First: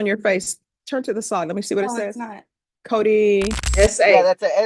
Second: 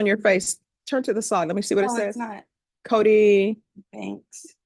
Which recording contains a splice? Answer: first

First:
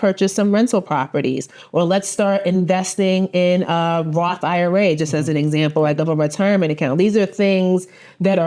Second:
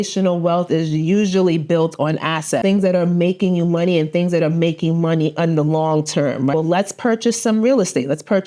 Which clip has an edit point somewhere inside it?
second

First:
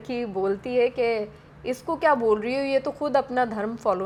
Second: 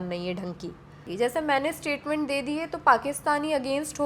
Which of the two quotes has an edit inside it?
second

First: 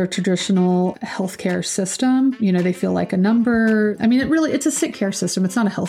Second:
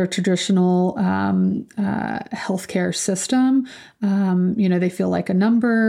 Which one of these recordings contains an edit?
first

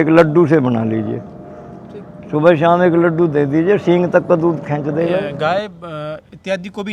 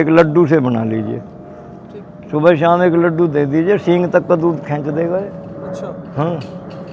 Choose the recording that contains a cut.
first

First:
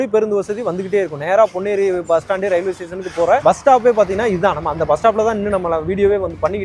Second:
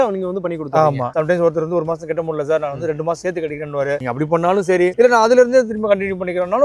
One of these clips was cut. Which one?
second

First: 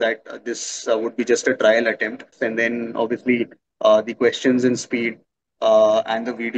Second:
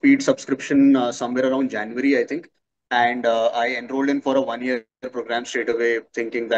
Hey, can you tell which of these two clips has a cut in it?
first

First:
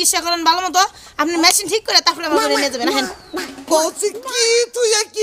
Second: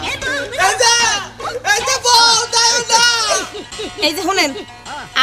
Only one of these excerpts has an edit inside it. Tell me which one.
second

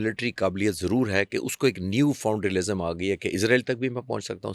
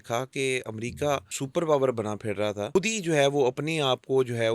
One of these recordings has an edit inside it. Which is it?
second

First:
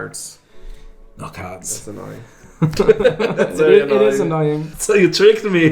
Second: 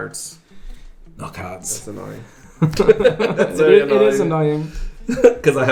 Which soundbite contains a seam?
first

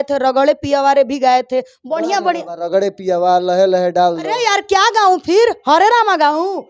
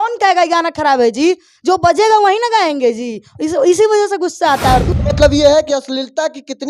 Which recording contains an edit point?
second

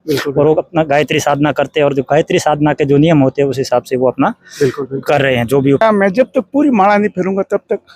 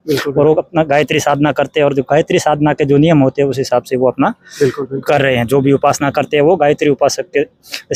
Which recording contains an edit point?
first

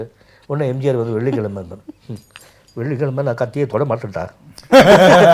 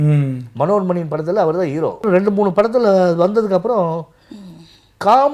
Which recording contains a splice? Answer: second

